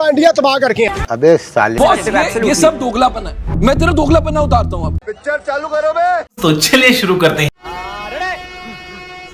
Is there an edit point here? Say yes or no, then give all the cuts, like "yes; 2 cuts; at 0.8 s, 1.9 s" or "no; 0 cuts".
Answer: no; 0 cuts